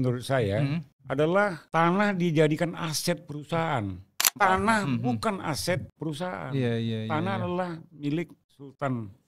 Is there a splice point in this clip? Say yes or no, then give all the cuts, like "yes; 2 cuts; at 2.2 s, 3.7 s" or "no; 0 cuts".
yes; 4 cuts; at 0.9 s, 1.6 s, 4.4 s, 5.9 s